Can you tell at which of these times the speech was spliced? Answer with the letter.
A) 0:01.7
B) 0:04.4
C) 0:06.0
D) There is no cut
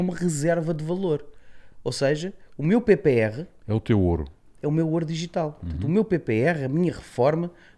D